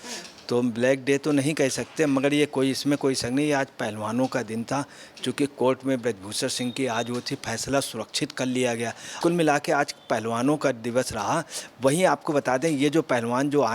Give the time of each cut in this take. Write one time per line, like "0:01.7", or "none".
0:09.2